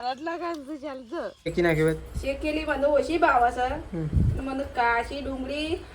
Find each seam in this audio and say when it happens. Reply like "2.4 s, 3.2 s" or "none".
1.5 s